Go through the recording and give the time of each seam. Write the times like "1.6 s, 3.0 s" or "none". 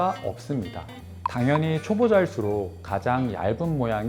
1.3 s